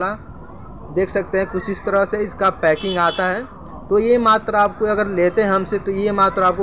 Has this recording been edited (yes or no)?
no